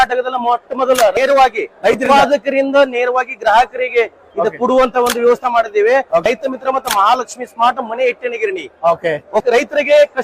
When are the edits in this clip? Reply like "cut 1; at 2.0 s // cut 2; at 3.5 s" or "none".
cut 1; at 1.1 s // cut 2; at 6.2 s // cut 3; at 9.4 s

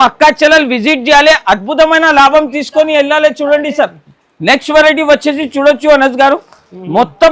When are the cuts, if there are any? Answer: none

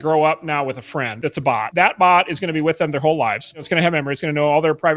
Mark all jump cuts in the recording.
cut 1; at 1.5 s // cut 2; at 3.7 s

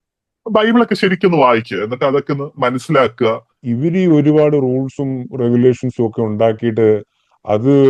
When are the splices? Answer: cut 1; at 3.5 s

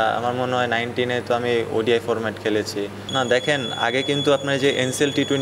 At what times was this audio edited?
cut 1; at 3.0 s

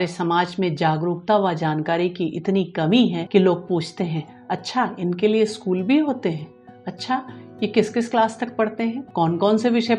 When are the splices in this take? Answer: cut 1; at 3.2 s // cut 2; at 9.0 s

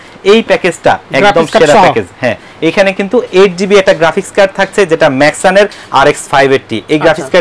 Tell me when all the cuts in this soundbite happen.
none

